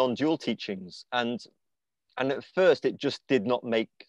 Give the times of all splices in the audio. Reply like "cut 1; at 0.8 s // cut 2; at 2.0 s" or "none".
none